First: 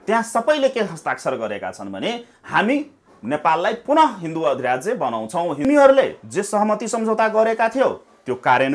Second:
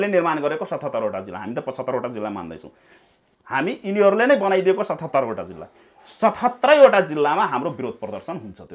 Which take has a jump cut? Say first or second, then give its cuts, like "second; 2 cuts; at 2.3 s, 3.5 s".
first; 1 cut; at 5.6 s